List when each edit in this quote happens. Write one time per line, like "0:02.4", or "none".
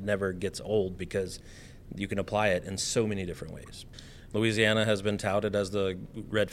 0:03.8